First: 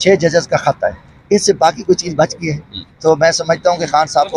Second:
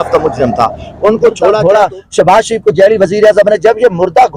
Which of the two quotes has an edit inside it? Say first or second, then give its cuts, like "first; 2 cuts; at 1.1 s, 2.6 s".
second; 1 cut; at 1.6 s